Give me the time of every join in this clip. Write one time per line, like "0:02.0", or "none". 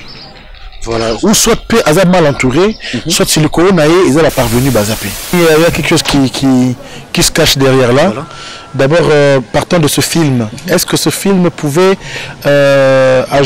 0:05.3